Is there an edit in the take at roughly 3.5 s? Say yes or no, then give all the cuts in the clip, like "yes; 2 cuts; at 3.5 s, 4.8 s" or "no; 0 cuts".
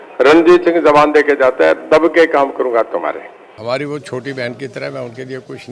yes; 1 cut; at 3.5 s